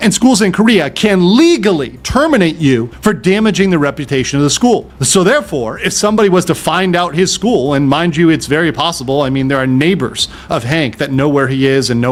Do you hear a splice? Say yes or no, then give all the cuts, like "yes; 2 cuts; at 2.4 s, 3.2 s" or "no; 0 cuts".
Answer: no; 0 cuts